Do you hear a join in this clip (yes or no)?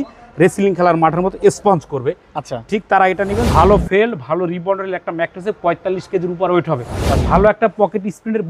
yes